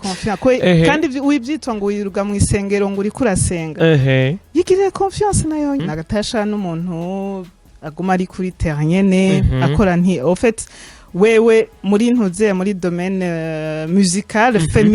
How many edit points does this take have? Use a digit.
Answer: 1